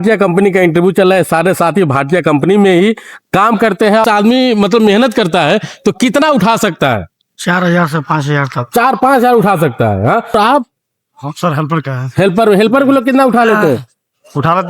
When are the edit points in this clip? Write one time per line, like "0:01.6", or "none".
0:04.0
0:10.2